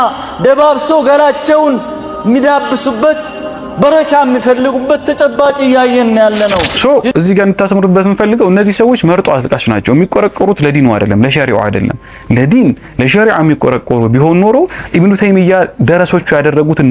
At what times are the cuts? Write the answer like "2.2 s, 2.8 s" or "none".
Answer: 6.7 s

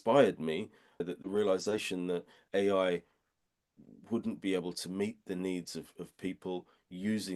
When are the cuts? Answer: 1.0 s

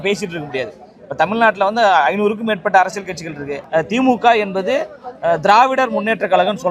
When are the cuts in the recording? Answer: 3.5 s

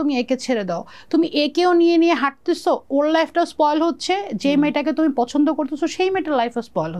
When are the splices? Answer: none

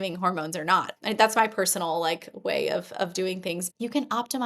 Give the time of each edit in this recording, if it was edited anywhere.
0.9 s, 3.7 s

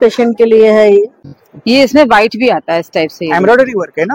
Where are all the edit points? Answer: 1.2 s

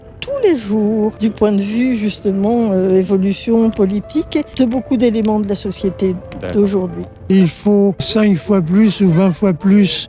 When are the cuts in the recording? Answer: 1.2 s, 4.5 s, 7.3 s

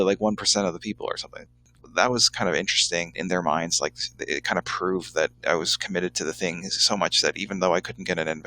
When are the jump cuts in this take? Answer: 1.8 s

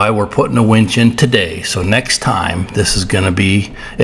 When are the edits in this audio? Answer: none

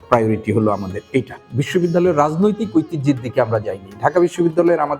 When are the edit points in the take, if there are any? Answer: 1.4 s

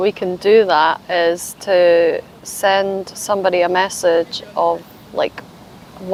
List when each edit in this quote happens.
none

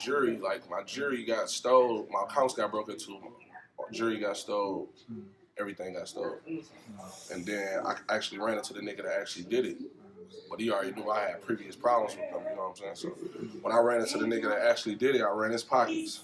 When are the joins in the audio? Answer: none

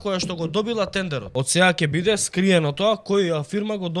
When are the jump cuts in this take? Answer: 1.2 s

